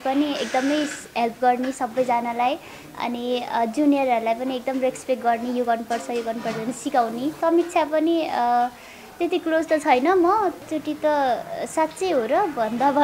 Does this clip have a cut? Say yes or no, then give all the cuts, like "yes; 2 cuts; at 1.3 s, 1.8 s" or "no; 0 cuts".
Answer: yes; 2 cuts; at 7.4 s, 10.6 s